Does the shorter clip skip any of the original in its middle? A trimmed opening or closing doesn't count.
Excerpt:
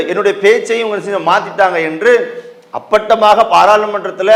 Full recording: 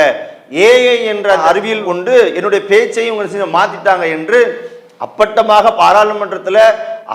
no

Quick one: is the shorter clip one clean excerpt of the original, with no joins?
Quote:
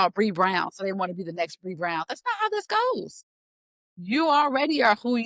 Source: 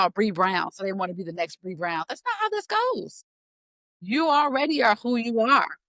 yes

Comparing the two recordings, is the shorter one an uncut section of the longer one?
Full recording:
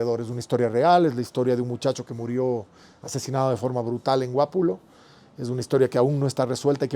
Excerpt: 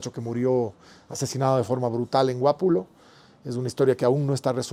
yes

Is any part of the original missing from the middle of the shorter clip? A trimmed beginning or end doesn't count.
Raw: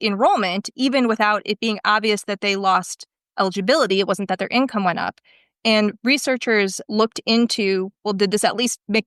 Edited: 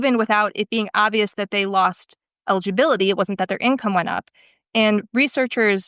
no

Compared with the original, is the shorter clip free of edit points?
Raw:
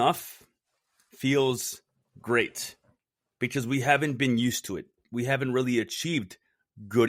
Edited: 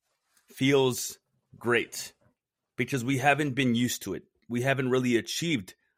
yes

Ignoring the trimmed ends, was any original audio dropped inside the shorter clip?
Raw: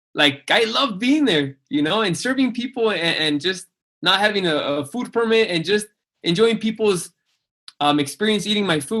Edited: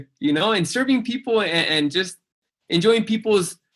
yes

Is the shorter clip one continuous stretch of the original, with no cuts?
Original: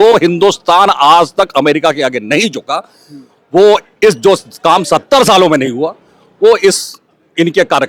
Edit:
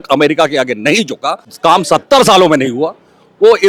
no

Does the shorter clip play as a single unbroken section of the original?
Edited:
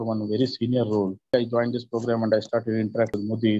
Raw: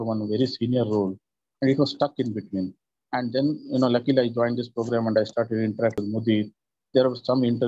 no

